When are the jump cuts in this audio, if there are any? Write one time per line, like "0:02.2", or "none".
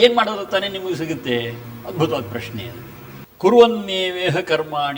none

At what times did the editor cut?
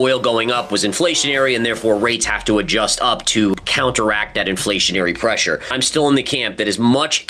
0:03.7
0:05.7

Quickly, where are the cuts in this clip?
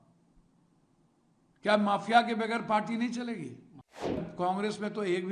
0:04.2

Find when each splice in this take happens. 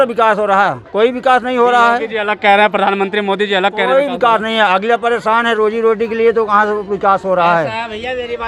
none

